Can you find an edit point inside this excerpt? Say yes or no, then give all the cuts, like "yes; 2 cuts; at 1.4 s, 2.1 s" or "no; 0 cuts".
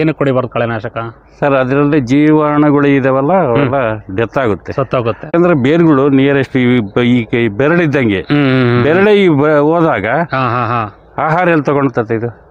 yes; 1 cut; at 5.3 s